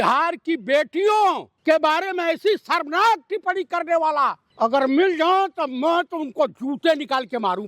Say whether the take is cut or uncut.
cut